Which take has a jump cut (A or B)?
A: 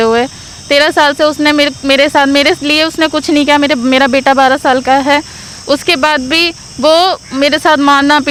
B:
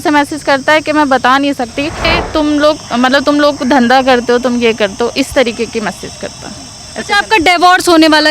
B